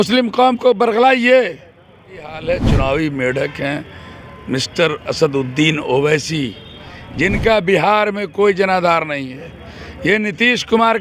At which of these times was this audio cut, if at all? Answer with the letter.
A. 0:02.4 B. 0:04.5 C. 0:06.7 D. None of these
A